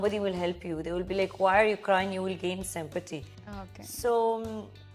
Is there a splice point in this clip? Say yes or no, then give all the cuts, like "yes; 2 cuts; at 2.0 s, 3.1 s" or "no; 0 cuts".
no; 0 cuts